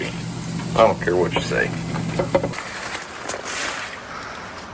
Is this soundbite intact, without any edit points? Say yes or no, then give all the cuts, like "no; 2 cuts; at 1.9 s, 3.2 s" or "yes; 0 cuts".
no; 1 cut; at 2.6 s